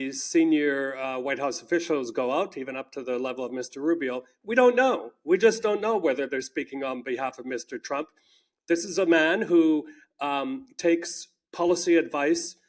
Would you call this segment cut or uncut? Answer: uncut